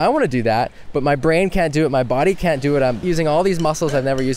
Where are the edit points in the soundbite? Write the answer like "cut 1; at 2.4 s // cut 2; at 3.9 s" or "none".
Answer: cut 1; at 3.0 s